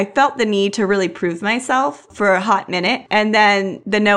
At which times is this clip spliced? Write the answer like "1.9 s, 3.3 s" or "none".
2.1 s